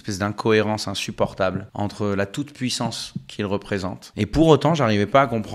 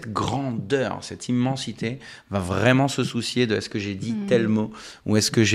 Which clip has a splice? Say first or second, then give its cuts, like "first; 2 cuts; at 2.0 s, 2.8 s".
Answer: first; 2 cuts; at 1.7 s, 4.0 s